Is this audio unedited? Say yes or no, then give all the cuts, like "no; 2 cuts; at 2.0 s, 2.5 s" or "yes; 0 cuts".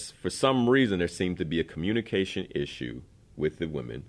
yes; 0 cuts